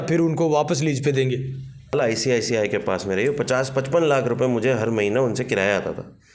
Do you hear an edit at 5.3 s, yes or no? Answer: no